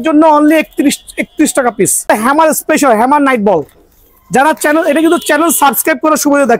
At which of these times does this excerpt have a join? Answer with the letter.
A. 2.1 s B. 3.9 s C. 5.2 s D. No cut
A